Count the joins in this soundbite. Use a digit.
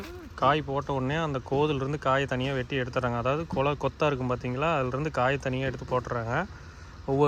0